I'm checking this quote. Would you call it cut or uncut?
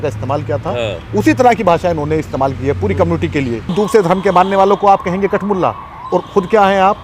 cut